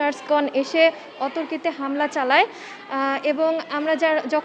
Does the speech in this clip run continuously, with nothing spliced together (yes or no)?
yes